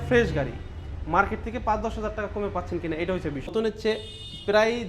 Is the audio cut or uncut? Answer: cut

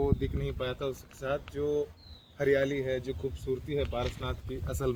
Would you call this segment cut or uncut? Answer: uncut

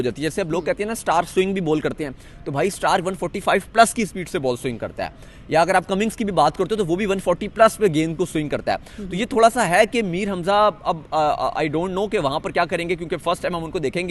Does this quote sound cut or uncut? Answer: uncut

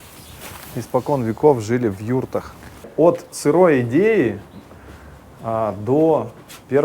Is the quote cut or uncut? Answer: cut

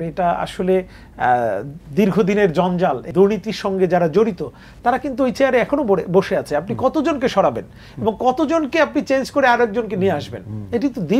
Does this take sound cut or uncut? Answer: cut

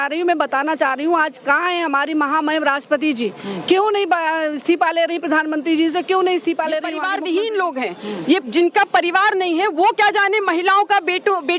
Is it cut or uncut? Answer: cut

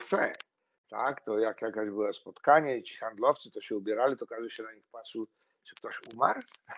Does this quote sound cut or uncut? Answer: uncut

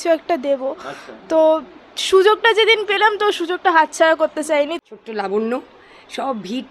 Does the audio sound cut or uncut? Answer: cut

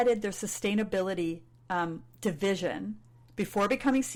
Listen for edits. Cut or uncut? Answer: uncut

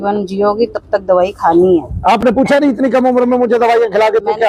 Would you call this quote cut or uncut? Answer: uncut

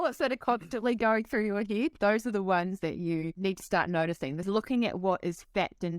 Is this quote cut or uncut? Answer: cut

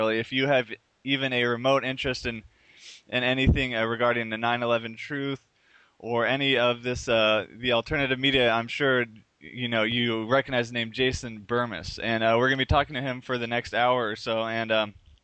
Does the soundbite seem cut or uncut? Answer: cut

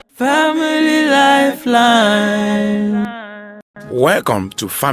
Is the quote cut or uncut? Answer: uncut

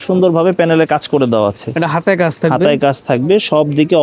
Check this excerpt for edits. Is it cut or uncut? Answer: uncut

